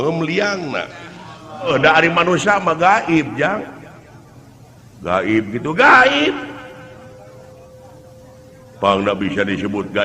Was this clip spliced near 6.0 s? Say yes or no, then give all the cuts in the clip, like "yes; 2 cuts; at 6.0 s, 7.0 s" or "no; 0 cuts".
no; 1 cut; at 1.7 s